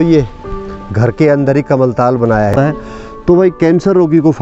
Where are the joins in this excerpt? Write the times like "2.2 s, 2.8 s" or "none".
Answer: 2.5 s